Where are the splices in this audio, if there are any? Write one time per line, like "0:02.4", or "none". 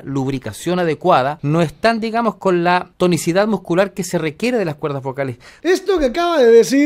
0:01.4
0:02.9
0:05.5